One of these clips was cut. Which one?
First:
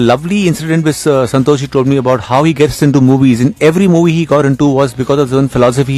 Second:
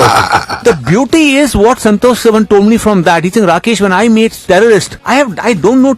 second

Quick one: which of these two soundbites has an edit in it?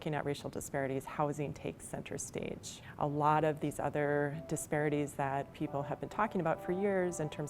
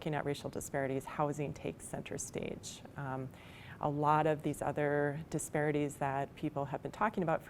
first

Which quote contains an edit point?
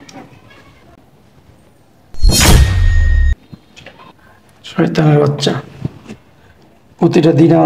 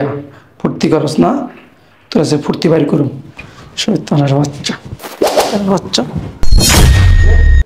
first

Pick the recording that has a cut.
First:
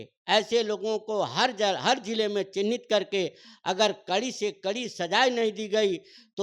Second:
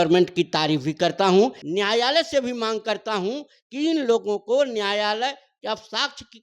second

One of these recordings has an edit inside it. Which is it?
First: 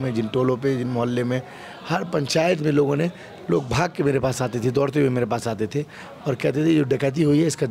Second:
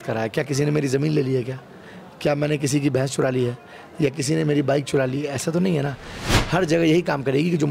second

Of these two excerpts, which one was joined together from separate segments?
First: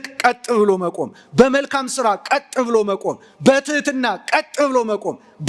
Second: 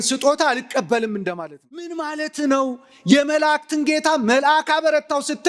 second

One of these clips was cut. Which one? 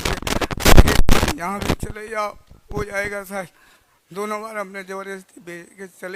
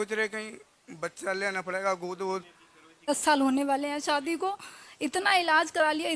second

